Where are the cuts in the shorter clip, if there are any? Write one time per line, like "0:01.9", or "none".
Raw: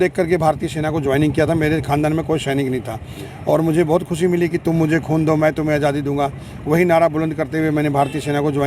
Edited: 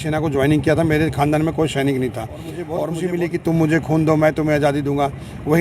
0:02.7